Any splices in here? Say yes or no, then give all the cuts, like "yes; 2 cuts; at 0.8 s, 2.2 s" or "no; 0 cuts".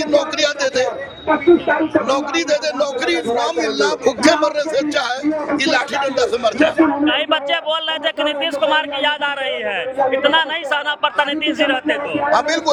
no; 0 cuts